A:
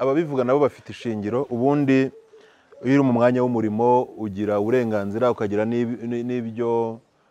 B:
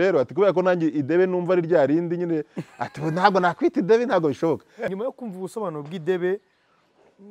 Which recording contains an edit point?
B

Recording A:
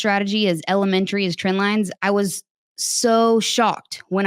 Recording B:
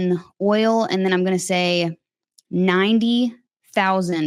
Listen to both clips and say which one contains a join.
A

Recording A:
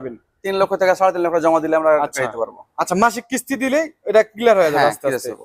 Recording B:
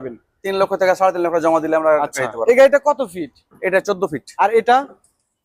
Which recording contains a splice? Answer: B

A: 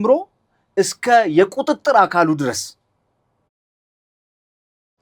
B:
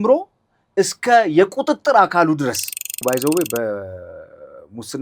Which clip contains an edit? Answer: B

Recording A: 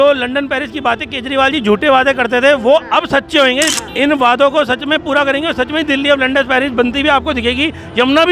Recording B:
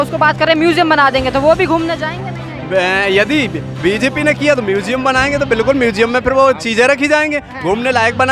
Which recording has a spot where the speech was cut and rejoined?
A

